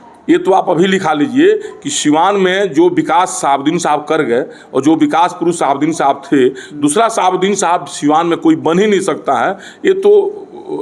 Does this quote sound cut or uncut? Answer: uncut